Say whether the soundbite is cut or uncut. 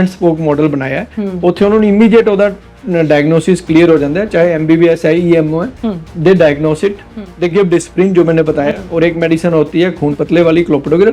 uncut